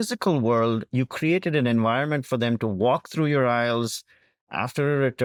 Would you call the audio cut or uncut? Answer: uncut